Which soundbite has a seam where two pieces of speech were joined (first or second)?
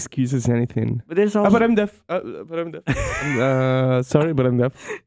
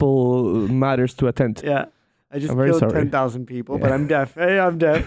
second